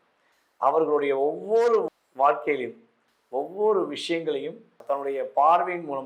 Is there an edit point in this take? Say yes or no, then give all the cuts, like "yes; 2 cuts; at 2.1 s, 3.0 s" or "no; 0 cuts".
yes; 1 cut; at 4.8 s